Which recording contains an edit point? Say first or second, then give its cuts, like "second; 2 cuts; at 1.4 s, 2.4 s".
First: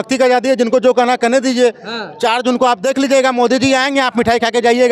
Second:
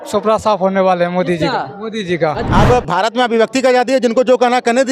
second; 1 cut; at 2.4 s